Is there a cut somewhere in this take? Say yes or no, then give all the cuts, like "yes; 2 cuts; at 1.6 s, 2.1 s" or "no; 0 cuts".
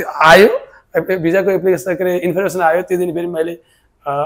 no; 0 cuts